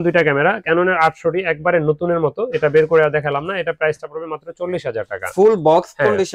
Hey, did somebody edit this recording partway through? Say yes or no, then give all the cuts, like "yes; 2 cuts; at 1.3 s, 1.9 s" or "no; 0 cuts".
no; 0 cuts